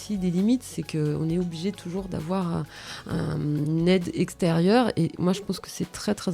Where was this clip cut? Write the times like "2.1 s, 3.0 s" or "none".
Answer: none